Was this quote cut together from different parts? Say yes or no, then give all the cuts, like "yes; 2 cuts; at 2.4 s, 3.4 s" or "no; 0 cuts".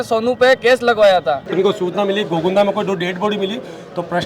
yes; 1 cut; at 1.5 s